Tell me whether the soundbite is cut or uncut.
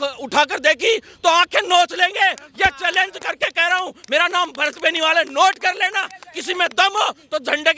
uncut